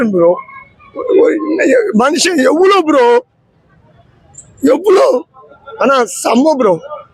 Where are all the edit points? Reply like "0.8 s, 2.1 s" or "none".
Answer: none